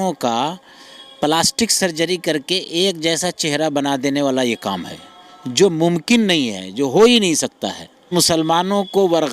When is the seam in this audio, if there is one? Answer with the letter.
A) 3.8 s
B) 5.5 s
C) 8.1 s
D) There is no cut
C